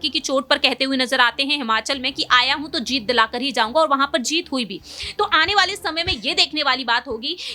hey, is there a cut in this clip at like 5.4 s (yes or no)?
no